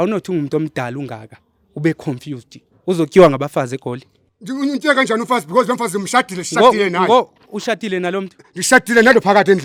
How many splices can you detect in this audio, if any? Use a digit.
0